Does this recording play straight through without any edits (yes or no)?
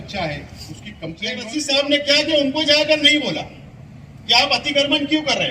no